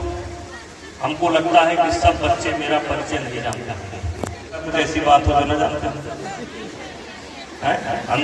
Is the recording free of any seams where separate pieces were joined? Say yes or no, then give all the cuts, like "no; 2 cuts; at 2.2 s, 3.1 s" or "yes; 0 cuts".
no; 1 cut; at 4.7 s